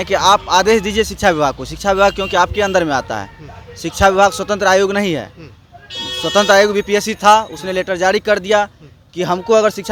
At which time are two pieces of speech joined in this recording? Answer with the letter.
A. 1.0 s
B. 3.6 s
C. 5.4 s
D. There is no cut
D